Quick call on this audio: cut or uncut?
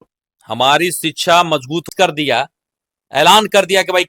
cut